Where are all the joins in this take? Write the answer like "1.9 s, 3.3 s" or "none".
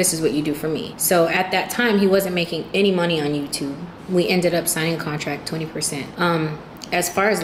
0.9 s, 3.9 s, 5.8 s